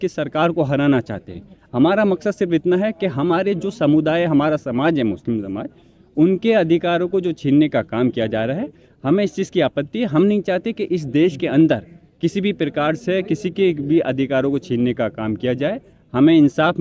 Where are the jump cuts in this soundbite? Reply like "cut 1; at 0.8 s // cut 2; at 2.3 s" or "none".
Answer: none

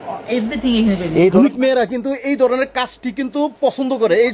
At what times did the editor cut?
cut 1; at 1.3 s

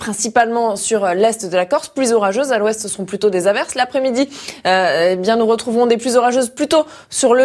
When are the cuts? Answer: none

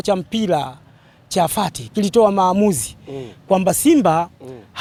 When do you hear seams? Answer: none

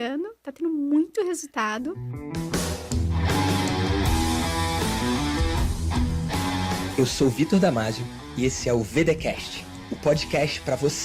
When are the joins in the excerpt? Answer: cut 1; at 2.1 s

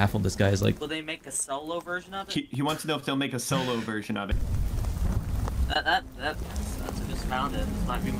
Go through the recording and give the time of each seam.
cut 1; at 4.3 s

